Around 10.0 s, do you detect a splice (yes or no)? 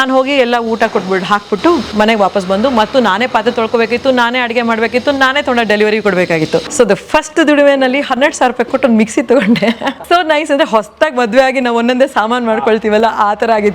yes